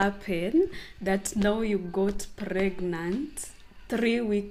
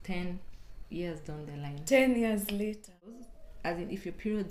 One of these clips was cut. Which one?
second; 1 cut; at 3.2 s

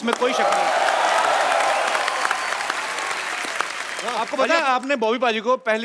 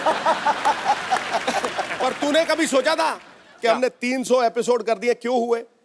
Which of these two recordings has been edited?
first; 1 cut; at 4.1 s

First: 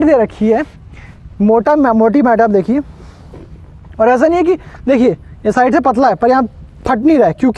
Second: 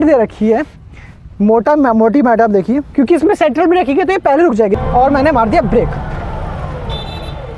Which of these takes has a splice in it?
second; 2 cuts; at 2.9 s, 4.8 s

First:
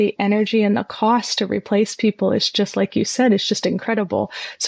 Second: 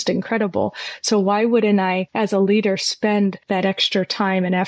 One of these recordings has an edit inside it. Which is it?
second; 2 cuts; at 2.1 s, 3.4 s

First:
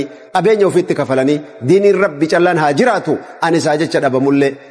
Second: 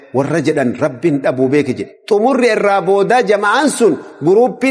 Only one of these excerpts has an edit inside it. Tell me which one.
second; 1 cut; at 1.9 s

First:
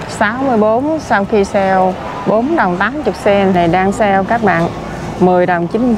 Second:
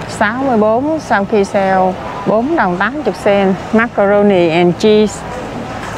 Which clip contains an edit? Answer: first; 1 cut; at 3.5 s

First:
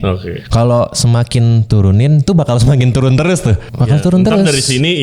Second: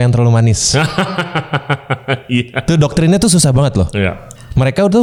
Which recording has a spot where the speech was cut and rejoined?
first; 1 cut; at 3.7 s

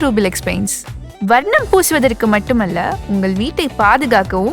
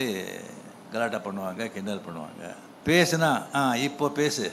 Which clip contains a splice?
second; 1 cut; at 2.7 s

